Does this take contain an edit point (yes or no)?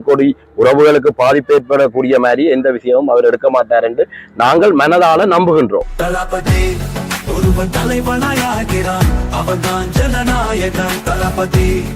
yes